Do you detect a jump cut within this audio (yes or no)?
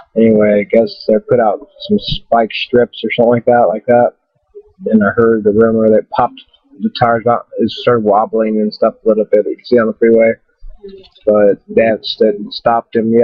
yes